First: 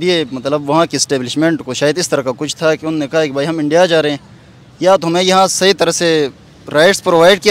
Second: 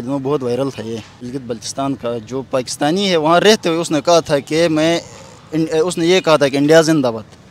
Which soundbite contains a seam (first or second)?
second